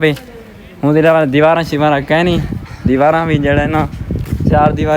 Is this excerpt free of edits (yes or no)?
yes